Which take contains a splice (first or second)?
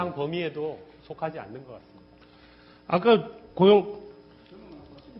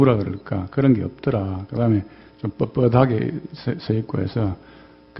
first